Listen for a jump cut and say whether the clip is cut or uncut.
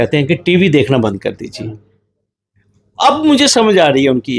uncut